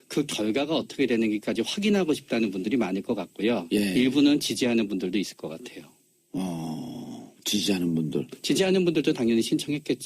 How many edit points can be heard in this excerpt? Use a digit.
1